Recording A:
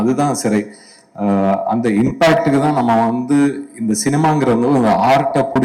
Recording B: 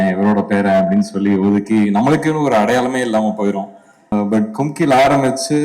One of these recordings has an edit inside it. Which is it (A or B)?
B